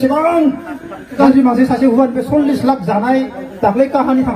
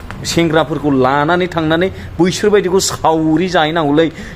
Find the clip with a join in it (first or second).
first